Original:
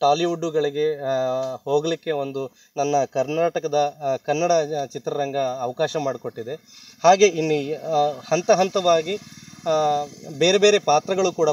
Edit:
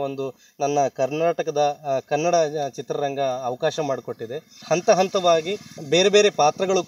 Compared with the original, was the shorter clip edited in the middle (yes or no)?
yes